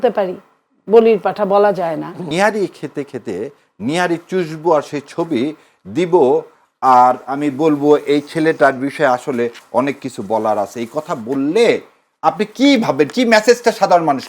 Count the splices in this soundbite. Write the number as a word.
one